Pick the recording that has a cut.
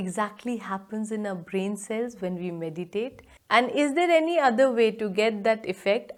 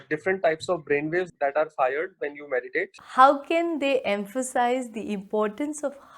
second; 2 cuts; at 1.3 s, 3.0 s

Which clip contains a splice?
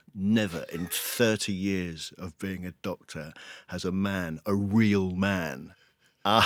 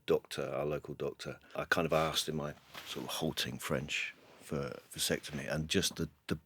second; 1 cut; at 1.4 s

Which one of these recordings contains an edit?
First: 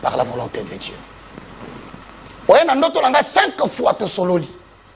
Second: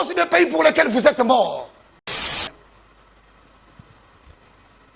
second; 1 cut; at 2.4 s

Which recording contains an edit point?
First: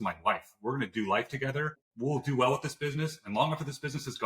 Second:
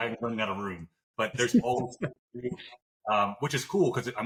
first; 1 cut; at 1.8 s

